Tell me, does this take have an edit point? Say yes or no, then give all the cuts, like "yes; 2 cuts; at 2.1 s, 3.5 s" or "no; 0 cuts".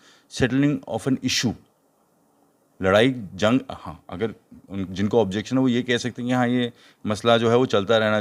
no; 0 cuts